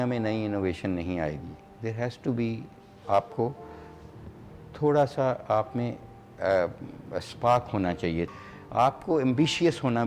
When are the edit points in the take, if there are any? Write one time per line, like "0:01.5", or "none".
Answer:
0:08.3